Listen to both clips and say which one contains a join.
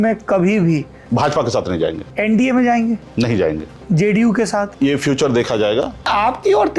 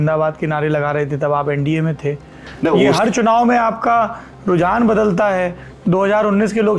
first; 4 cuts; at 2.0 s, 3.7 s, 4.7 s, 6.1 s

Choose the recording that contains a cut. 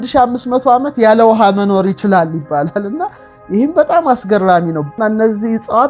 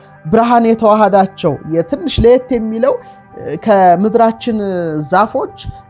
first; 1 cut; at 5.0 s

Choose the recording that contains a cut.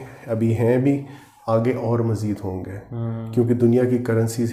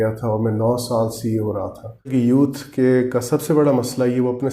second; 1 cut; at 2.1 s

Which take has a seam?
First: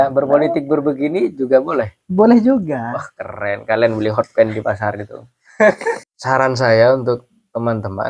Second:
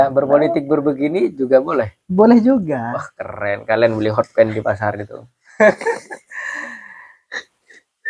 first; 1 cut; at 6.1 s

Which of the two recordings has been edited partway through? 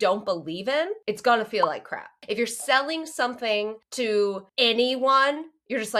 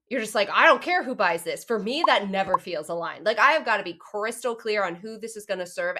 first; 4 cuts; at 1.0 s, 2.2 s, 3.8 s, 4.5 s

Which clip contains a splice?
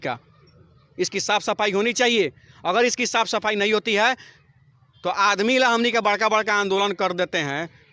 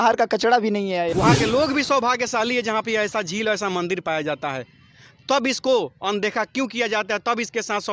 second; 1 cut; at 1.1 s

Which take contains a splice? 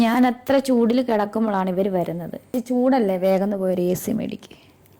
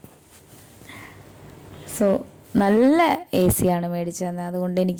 first; 1 cut; at 2.5 s

